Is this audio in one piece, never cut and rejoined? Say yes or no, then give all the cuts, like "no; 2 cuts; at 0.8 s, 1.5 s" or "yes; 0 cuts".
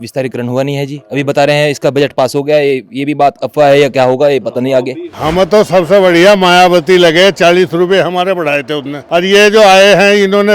no; 2 cuts; at 5.0 s, 8.9 s